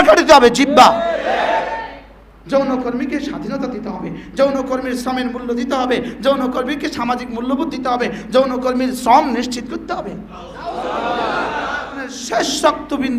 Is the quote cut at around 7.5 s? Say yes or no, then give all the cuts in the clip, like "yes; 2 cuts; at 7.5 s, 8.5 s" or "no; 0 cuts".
no; 1 cut; at 12.2 s